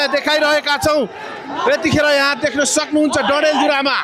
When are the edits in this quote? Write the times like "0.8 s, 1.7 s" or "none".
none